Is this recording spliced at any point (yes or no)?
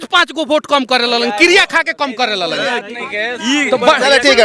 no